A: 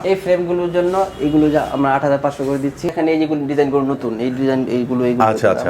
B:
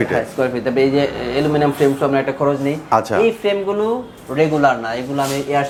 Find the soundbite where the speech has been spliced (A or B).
A